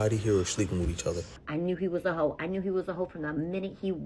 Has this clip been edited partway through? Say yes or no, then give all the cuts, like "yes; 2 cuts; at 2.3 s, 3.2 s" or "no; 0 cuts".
yes; 1 cut; at 1.3 s